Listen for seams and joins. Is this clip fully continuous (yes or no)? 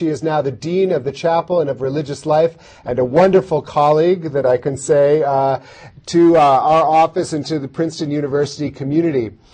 yes